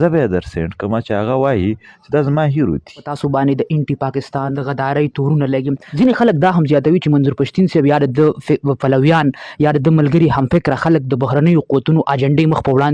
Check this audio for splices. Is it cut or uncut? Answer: cut